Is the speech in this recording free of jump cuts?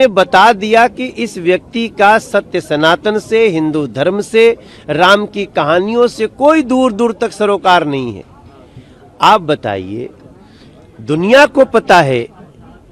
yes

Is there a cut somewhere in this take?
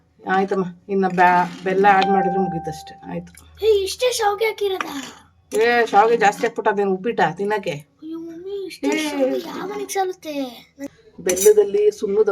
yes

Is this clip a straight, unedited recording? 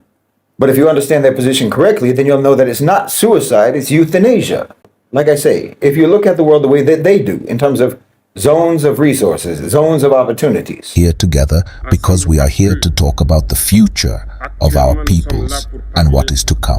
no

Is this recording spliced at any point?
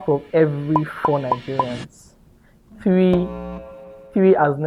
no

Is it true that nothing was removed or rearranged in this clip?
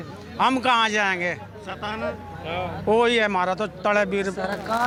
yes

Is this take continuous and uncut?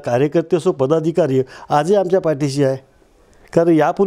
yes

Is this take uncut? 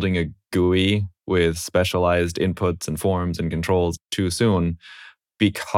no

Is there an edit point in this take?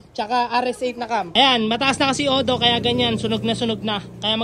yes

